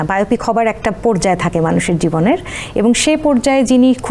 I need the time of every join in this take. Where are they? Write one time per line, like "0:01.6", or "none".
none